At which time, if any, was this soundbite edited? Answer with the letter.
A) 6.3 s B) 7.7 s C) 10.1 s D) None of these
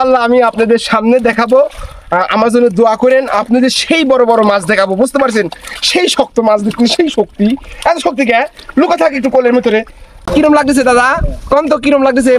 C